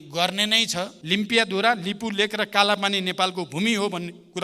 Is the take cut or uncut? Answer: cut